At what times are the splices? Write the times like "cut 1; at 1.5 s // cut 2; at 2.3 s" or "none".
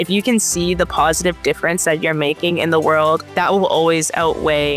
cut 1; at 3.3 s